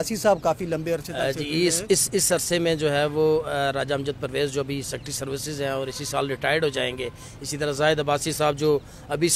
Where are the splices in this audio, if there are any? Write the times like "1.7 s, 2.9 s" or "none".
none